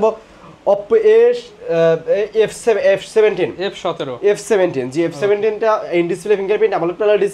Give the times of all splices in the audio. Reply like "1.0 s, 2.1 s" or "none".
none